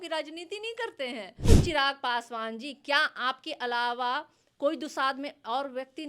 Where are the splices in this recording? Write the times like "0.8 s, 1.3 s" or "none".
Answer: 1.5 s